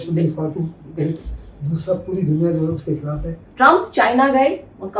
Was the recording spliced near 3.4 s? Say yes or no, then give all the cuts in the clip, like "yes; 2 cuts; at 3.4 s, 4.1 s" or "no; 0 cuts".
yes; 1 cut; at 3.4 s